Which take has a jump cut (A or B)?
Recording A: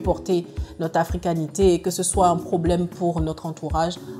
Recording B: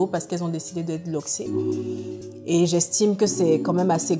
B